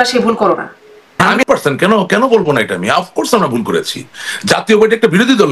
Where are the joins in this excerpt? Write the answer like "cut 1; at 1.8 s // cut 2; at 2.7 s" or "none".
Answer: cut 1; at 1.3 s